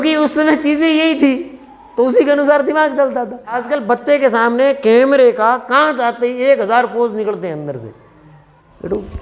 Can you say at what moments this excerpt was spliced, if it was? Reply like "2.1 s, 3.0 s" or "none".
3.6 s